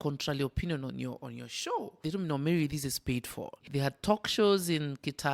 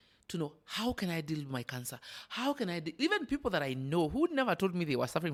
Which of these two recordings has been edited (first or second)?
first